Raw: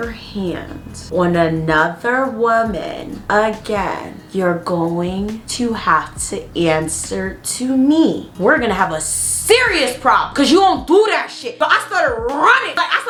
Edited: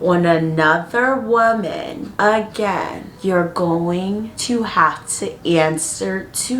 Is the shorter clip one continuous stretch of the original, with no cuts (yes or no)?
yes